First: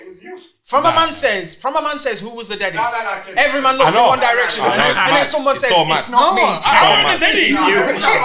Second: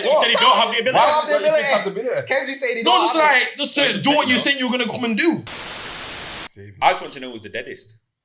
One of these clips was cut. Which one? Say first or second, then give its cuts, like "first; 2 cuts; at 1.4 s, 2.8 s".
second; 1 cut; at 6.0 s